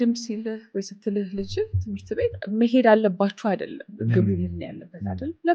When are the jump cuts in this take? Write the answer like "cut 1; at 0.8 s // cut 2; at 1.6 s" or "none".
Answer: cut 1; at 2.4 s // cut 2; at 3.8 s